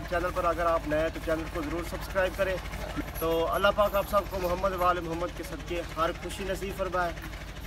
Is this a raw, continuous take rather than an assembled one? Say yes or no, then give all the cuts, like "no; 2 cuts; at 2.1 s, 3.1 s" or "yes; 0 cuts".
yes; 0 cuts